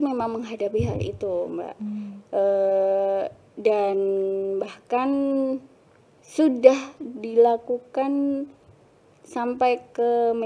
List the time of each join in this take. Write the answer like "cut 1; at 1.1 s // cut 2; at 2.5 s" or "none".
none